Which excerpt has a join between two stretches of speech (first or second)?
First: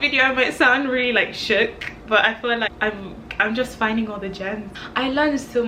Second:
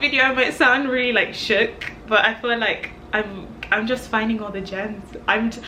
first